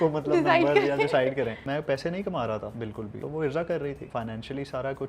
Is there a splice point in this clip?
yes; 3 cuts; at 1.6 s, 3.1 s, 4.0 s

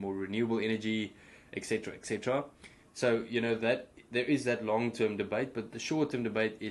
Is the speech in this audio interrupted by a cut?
no; 0 cuts

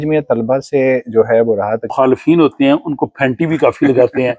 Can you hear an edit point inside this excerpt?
yes; 1 cut; at 1.9 s

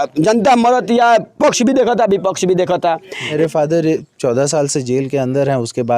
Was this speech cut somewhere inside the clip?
yes; 1 cut; at 3.3 s

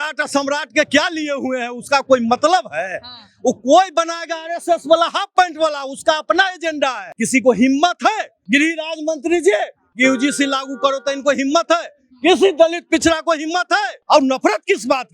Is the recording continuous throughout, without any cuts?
no; 3 cuts; at 7.1 s, 8.3 s, 13.9 s

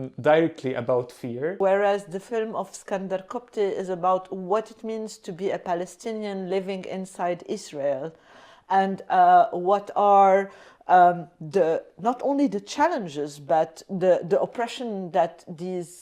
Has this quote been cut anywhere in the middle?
yes; 1 cut; at 1.6 s

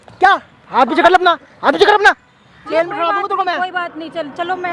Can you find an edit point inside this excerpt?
no; 0 cuts

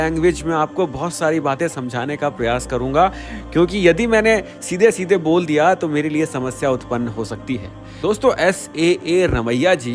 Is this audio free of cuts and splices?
yes; 0 cuts

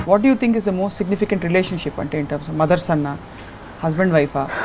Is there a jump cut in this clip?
no; 0 cuts

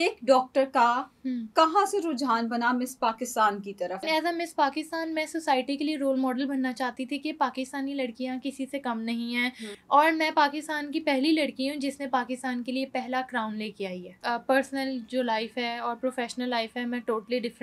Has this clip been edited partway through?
yes; 3 cuts; at 4.0 s, 9.7 s, 14.1 s

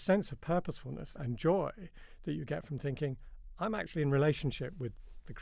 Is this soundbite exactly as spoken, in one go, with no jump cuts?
no; 1 cut; at 1.1 s

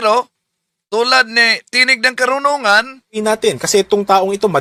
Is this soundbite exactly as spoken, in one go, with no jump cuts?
yes; 0 cuts

